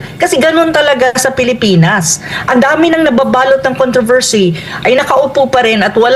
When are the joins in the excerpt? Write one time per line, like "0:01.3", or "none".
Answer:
none